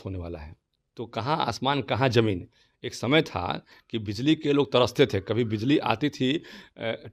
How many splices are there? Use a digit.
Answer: 0